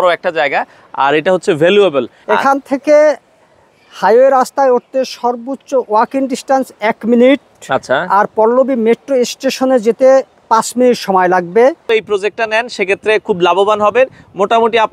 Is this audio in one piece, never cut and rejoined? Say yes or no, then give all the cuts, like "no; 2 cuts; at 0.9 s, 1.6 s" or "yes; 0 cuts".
no; 2 cuts; at 2.1 s, 11.9 s